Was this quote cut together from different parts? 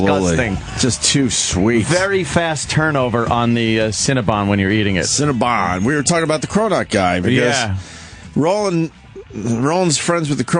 yes; 1 cut; at 1.7 s

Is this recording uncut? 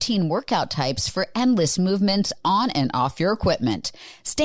yes; 0 cuts

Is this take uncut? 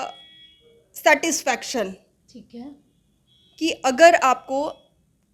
yes; 0 cuts

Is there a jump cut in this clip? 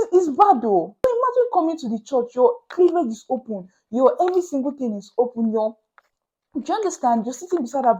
yes; 1 cut; at 0.9 s

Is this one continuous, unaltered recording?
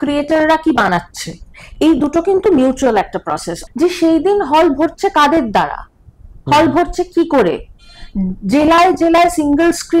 no; 1 cut; at 3.5 s

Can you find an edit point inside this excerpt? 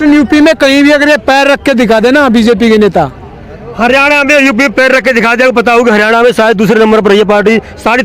no; 0 cuts

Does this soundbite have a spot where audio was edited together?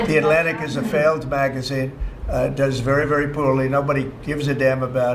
no; 0 cuts

